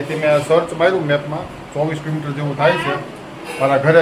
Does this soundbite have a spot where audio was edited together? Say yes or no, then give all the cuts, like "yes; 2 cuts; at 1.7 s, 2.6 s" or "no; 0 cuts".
no; 0 cuts